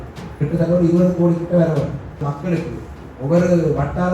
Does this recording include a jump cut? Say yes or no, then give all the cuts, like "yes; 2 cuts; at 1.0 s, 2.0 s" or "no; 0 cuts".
yes; 1 cut; at 2.2 s